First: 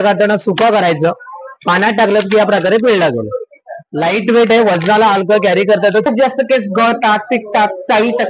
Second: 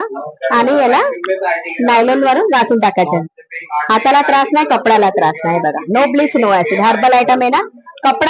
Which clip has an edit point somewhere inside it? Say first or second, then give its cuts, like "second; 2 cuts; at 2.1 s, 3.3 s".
first; 1 cut; at 6.1 s